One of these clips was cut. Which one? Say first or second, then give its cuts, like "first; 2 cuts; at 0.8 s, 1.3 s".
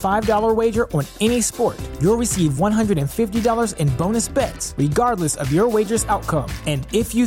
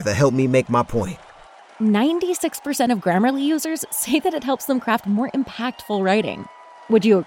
second; 1 cut; at 1.2 s